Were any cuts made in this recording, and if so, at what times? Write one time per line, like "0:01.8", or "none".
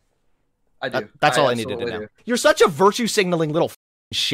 0:02.1